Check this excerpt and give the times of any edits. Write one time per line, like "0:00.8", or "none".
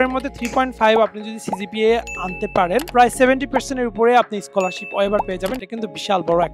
0:02.9
0:05.6